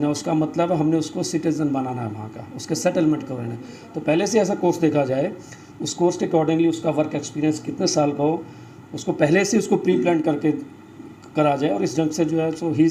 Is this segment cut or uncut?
uncut